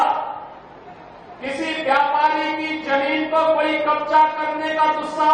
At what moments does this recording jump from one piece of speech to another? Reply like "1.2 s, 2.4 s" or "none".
none